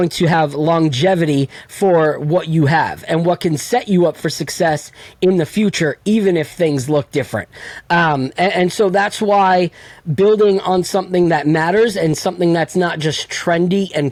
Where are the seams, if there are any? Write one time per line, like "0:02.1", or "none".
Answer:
none

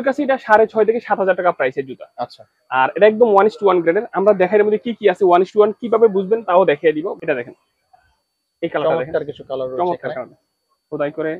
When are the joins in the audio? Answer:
0:07.1

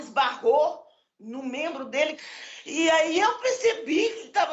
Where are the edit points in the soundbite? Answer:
0:02.2

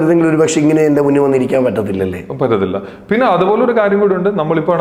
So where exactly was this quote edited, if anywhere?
none

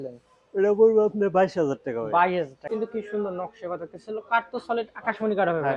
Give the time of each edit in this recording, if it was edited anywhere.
0:02.6

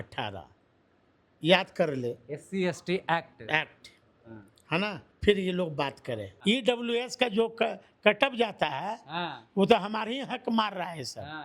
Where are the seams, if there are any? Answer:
0:06.4

